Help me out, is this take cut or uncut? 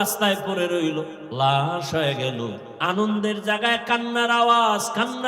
cut